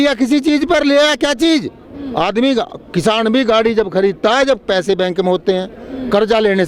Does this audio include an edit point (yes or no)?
no